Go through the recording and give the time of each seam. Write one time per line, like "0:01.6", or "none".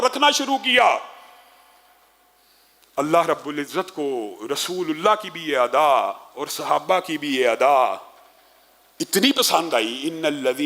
none